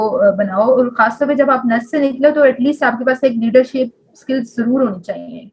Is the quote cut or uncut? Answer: uncut